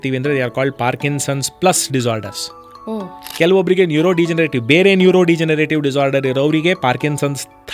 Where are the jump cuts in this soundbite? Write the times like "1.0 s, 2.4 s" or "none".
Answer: 3.2 s